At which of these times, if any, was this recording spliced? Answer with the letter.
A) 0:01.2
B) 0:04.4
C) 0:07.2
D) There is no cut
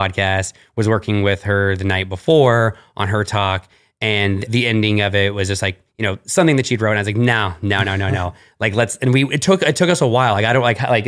B